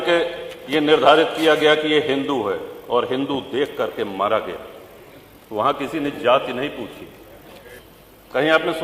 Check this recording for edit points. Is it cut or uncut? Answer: cut